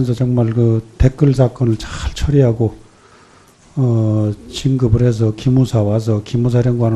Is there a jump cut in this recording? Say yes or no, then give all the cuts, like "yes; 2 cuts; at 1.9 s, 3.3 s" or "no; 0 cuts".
yes; 1 cut; at 1.3 s